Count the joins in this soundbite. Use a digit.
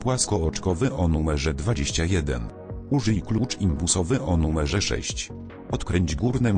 2